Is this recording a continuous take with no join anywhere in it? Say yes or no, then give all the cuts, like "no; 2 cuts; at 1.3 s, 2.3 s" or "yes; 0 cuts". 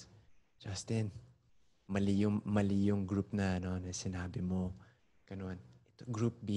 yes; 0 cuts